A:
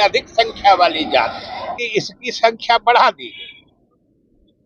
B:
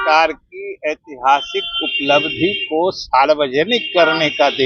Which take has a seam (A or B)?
A